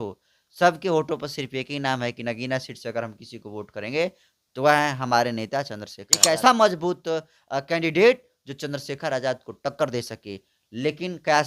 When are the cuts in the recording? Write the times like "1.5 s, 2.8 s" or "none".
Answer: 6.0 s